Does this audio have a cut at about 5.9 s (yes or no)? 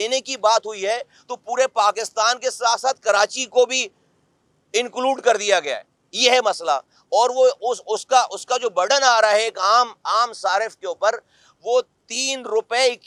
no